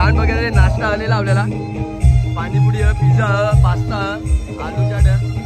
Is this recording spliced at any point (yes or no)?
no